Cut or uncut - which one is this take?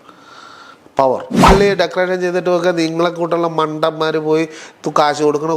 cut